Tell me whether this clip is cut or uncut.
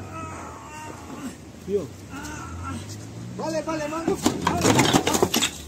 uncut